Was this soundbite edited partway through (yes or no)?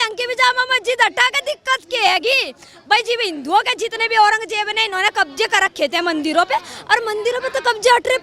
no